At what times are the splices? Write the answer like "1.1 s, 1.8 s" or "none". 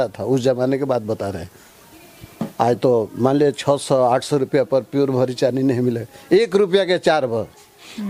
none